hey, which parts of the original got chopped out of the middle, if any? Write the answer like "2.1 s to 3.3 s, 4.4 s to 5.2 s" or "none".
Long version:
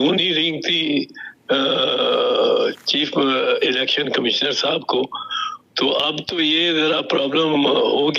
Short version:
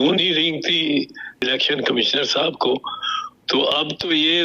1.4 s to 3.7 s

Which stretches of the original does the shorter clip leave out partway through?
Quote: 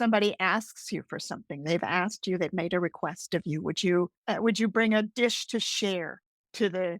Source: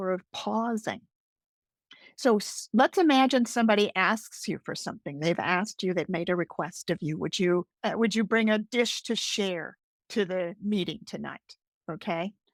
none

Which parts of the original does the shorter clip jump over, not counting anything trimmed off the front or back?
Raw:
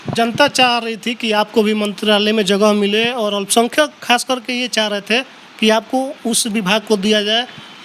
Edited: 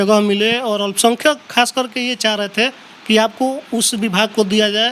none

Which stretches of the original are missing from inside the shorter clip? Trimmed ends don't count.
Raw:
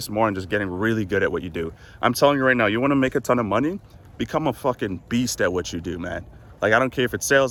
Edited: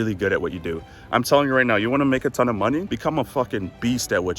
3.8 s to 4.2 s

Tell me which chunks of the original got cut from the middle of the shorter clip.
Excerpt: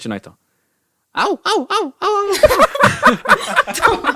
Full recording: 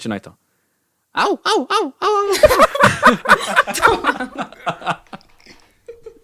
none

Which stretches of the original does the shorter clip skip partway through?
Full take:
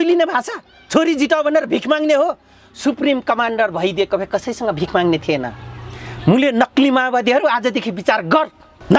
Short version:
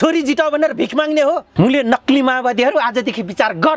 2.4 s to 6.1 s

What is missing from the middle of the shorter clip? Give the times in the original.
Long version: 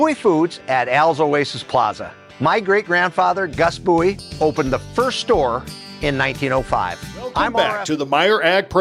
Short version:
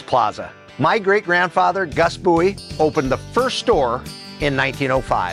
none

